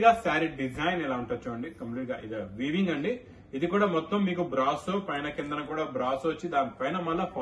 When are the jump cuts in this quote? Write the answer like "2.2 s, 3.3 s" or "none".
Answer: none